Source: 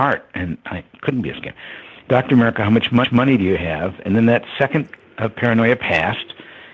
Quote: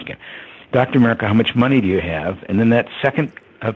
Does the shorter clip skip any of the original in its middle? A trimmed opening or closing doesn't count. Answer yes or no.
yes